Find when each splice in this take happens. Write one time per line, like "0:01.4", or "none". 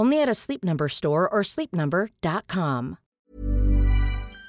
0:03.1

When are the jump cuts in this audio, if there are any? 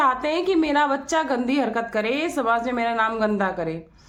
none

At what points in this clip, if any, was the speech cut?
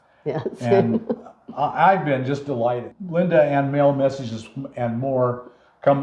0:02.9

